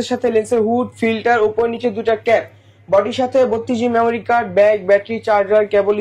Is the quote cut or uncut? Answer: uncut